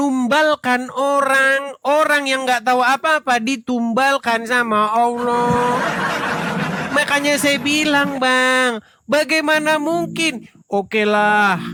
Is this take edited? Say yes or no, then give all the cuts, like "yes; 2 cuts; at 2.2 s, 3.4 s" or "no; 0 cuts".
no; 0 cuts